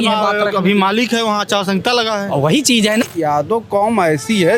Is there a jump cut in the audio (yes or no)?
yes